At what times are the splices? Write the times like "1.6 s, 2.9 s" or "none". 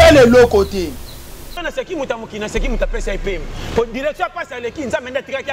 1.5 s